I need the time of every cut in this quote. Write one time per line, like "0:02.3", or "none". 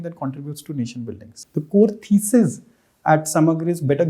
0:01.3